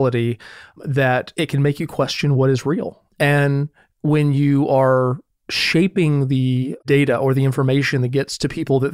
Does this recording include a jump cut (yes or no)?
yes